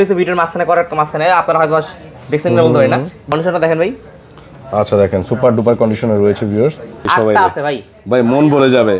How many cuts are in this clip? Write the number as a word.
two